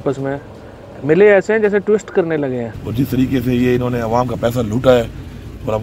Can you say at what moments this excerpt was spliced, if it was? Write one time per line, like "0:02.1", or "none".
0:02.8